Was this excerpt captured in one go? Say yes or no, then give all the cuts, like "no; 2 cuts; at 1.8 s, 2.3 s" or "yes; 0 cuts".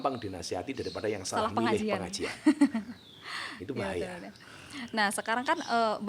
yes; 0 cuts